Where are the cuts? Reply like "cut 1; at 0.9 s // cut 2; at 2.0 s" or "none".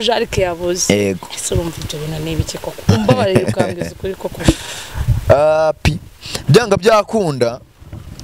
none